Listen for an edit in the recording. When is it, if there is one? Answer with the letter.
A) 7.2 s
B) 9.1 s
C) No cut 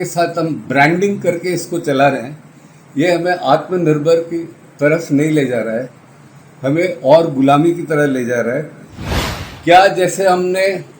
B